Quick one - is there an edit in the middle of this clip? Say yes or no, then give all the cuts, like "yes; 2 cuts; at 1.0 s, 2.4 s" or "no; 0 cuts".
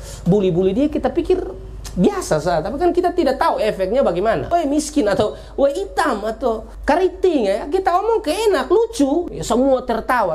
yes; 3 cuts; at 4.5 s, 6.7 s, 9.3 s